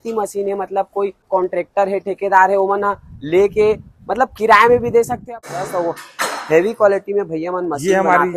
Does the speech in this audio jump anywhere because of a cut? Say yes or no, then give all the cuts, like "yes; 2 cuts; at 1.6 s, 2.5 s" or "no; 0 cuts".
yes; 2 cuts; at 1.3 s, 5.5 s